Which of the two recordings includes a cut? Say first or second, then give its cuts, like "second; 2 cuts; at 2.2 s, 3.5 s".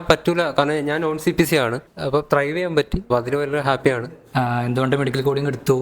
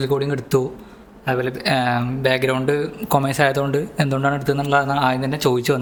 first; 3 cuts; at 2.0 s, 3.0 s, 4.2 s